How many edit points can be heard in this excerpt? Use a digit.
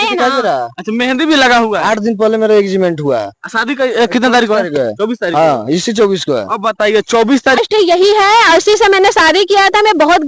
1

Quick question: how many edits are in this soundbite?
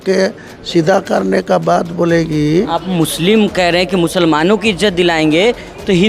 1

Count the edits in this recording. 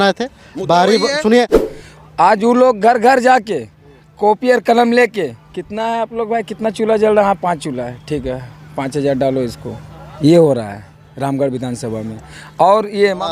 1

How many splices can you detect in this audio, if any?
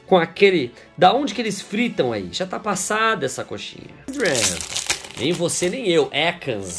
1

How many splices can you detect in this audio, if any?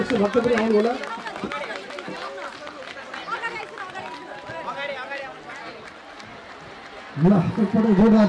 0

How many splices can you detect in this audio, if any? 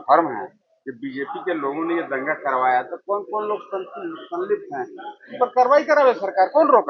0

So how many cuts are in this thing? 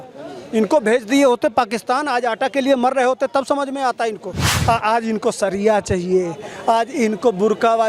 1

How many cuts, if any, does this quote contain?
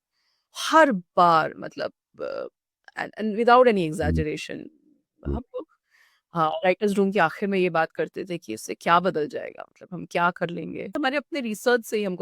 1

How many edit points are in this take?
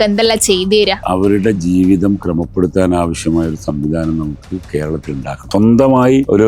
2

